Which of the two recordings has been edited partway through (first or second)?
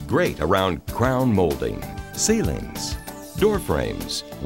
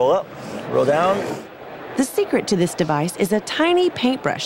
second